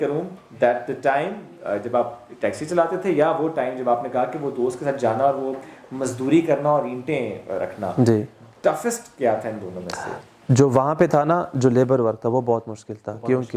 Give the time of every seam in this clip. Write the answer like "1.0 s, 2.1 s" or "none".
none